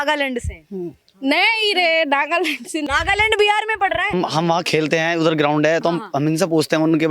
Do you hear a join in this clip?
yes; 2 cuts; at 2.9 s, 4.1 s

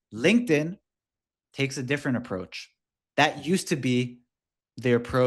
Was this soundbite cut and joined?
no; 0 cuts

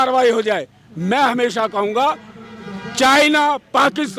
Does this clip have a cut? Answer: no; 0 cuts

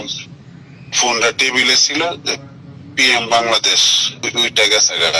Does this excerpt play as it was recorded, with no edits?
no; 1 cut; at 4.2 s

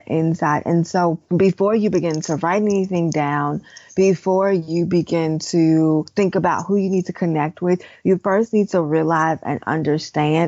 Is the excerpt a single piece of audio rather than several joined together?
no; 1 cut; at 6.1 s

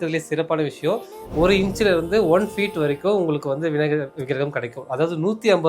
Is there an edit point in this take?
yes; 1 cut; at 1.2 s

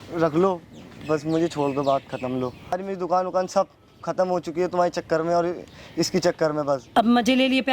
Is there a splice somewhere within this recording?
yes; 2 cuts; at 2.8 s, 6.9 s

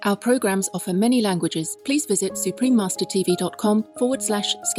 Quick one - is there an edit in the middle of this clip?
yes; 2 cuts; at 1.7 s, 3.9 s

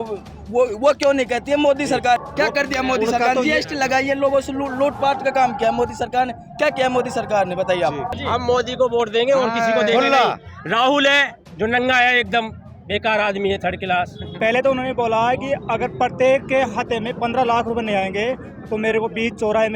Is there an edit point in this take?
yes; 3 cuts; at 2.2 s, 8.1 s, 14.2 s

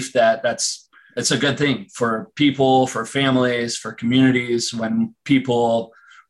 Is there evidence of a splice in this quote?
yes; 1 cut; at 1.1 s

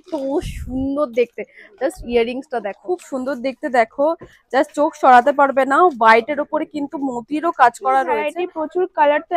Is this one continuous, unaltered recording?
no; 2 cuts; at 2.8 s, 8.3 s

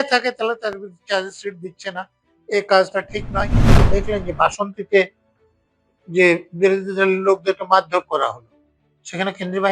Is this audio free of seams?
no; 1 cut; at 3.8 s

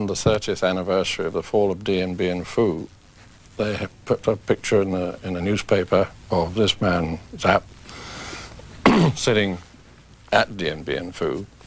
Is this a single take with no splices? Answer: yes; 0 cuts

